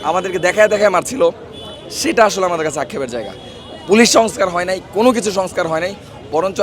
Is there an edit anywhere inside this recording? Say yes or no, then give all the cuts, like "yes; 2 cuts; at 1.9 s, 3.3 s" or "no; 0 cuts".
no; 0 cuts